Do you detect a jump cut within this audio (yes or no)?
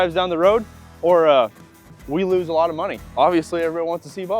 no